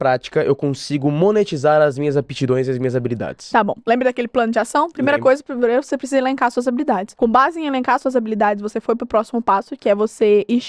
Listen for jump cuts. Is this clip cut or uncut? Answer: cut